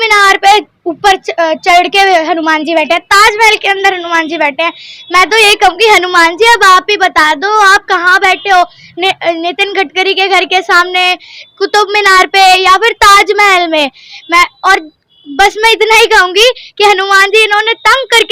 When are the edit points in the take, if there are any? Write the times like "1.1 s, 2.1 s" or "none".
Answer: none

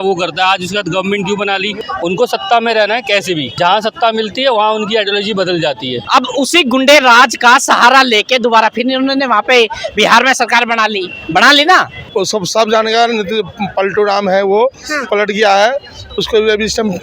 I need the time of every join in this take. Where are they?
1.8 s, 3.5 s, 6.0 s, 12.0 s

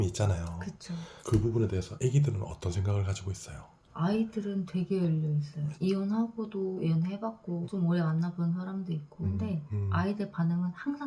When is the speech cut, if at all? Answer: 5.7 s

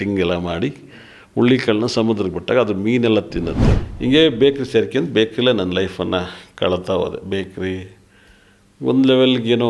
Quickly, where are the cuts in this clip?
3.6 s

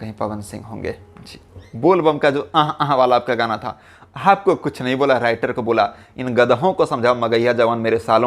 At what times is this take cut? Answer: 1.7 s

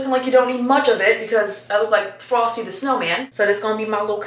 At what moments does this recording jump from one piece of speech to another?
3.3 s

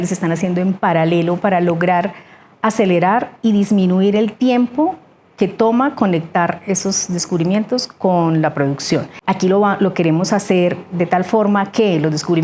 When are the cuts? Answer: 9.1 s

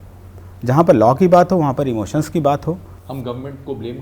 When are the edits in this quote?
2.9 s

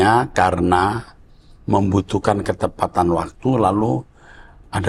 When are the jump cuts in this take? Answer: none

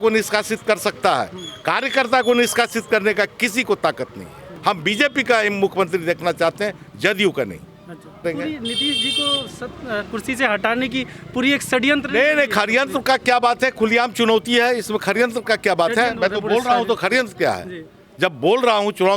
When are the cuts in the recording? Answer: 4.5 s, 8.2 s

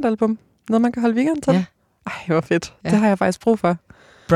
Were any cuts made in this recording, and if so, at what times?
none

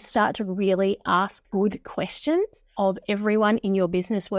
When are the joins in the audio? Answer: 1.4 s, 2.6 s

